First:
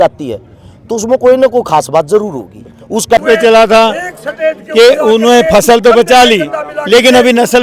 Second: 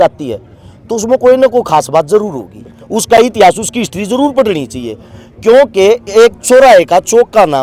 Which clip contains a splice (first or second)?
first